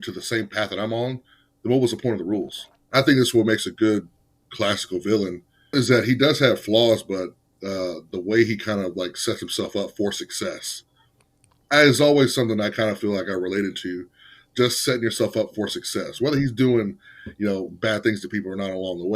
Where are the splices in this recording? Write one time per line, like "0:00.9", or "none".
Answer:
0:02.7